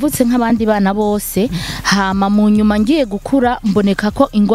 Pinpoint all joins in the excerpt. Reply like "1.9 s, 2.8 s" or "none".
none